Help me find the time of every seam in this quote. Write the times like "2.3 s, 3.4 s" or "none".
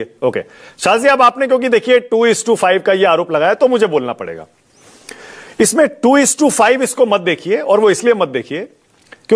none